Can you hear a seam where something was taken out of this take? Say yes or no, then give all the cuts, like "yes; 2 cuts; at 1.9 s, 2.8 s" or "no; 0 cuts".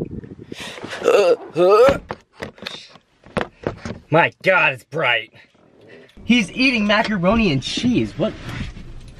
yes; 2 cuts; at 2.1 s, 6.1 s